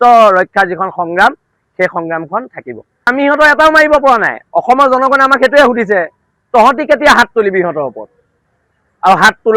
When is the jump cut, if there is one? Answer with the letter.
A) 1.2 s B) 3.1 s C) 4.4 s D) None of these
B